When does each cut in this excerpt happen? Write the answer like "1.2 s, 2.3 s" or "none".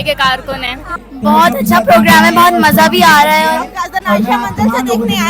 1.0 s